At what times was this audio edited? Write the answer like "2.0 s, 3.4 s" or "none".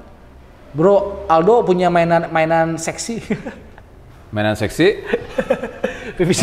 none